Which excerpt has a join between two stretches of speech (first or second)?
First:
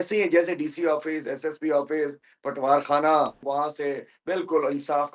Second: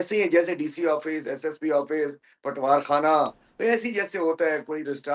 first